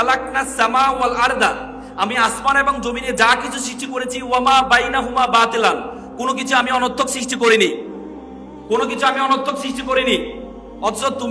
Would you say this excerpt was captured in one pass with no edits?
yes; 0 cuts

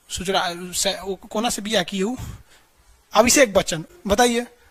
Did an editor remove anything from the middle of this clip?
no; 0 cuts

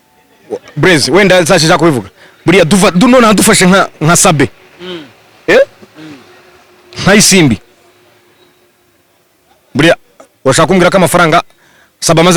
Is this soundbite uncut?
yes; 0 cuts

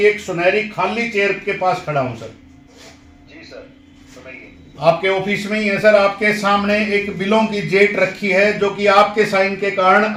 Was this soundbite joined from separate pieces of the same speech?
no; 0 cuts

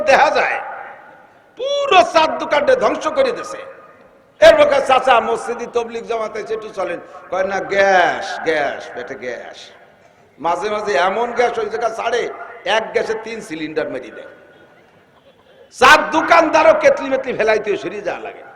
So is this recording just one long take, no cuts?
yes; 0 cuts

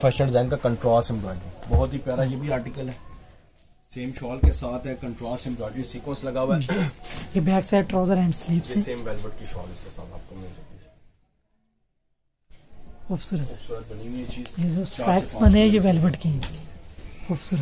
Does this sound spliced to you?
no; 0 cuts

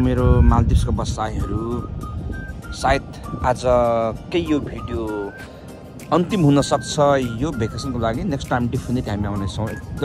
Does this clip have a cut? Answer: no; 0 cuts

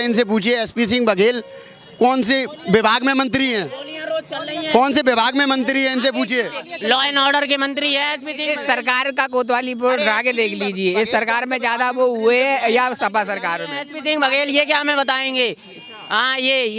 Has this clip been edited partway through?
no; 0 cuts

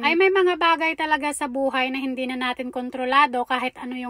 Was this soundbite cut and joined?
no; 0 cuts

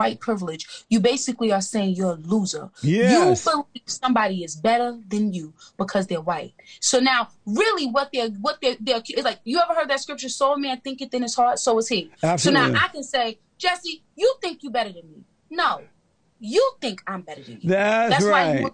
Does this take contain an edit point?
no; 0 cuts

